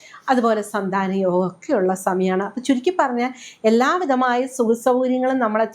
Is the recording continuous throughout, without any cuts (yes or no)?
yes